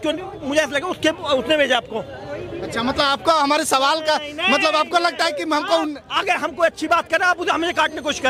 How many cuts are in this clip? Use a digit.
0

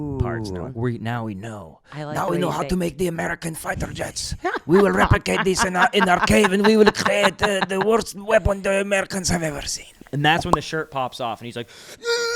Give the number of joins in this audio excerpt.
1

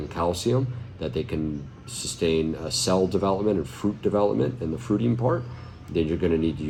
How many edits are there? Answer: 0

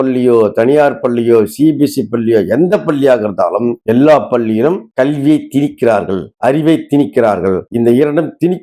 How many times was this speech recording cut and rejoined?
0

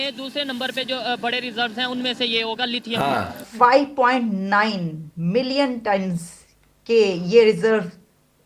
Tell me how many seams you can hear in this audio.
1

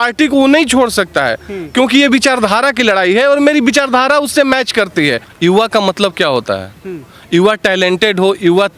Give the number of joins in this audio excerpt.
1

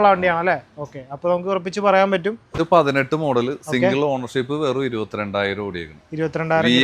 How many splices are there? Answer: 1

